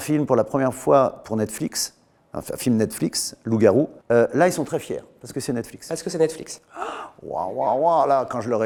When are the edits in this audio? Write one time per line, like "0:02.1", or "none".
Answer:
none